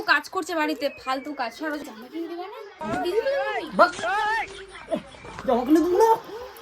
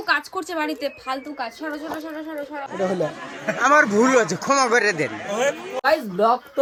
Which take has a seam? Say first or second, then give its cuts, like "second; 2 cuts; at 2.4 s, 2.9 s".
first; 1 cut; at 1.8 s